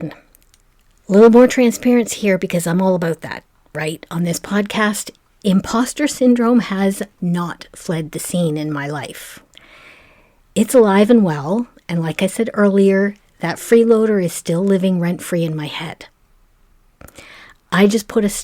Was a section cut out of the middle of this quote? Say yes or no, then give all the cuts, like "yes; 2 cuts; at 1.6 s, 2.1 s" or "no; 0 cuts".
no; 0 cuts